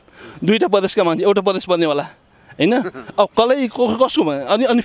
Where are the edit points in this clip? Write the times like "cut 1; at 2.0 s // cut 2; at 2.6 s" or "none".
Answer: none

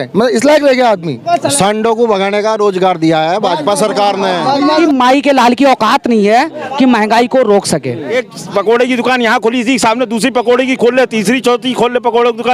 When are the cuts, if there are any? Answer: cut 1; at 1.2 s // cut 2; at 4.6 s // cut 3; at 8.3 s

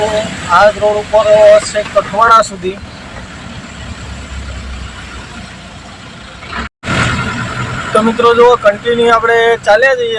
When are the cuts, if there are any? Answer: none

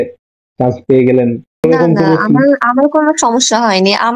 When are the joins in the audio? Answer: cut 1; at 1.6 s

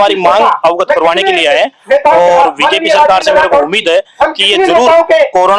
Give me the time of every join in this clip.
none

